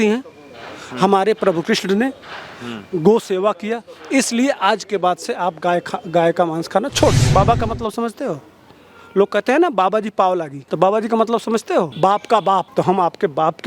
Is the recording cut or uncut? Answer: cut